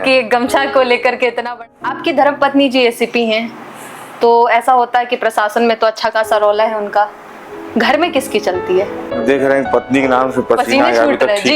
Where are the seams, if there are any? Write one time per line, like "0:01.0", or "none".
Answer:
0:01.6
0:09.2